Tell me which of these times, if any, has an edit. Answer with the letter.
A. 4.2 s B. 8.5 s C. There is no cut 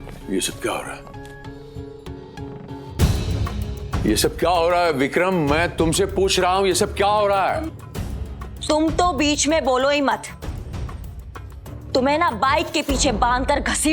B